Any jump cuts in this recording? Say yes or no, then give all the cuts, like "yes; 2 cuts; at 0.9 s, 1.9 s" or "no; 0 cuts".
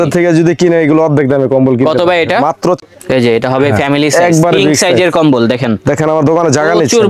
yes; 1 cut; at 2.8 s